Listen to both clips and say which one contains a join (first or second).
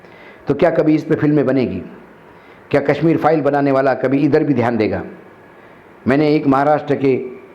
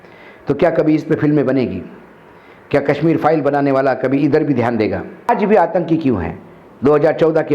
second